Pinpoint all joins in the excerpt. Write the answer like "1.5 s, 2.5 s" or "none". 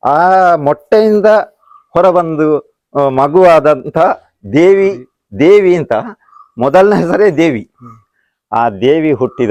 none